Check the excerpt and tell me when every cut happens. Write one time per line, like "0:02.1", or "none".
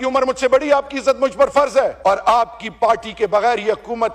0:02.1